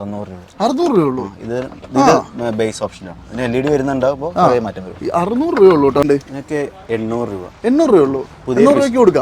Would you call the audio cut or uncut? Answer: cut